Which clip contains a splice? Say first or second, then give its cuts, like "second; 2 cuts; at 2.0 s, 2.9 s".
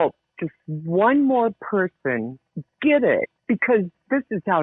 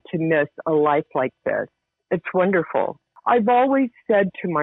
second; 1 cut; at 3.1 s